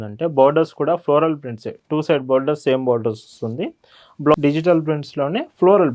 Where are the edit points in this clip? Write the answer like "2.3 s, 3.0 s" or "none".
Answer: 4.3 s